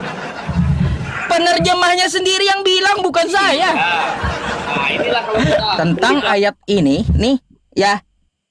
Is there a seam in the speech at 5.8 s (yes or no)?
yes